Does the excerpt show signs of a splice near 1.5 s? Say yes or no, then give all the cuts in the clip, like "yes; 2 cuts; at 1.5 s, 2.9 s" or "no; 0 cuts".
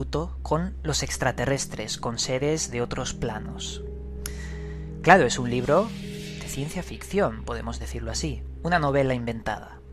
yes; 1 cut; at 1.5 s